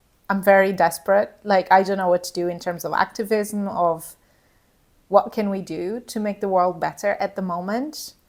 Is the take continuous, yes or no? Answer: yes